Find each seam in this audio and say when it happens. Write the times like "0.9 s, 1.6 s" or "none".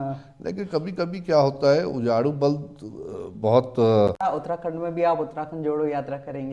4.2 s